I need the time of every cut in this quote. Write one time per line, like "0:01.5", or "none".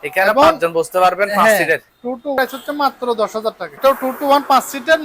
0:02.4
0:03.7